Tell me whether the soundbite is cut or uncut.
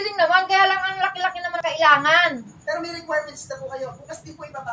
cut